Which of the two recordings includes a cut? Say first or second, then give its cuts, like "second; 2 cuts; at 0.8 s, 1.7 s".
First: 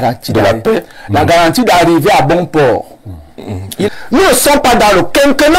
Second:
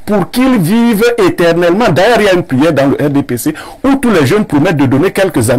first; 1 cut; at 3.9 s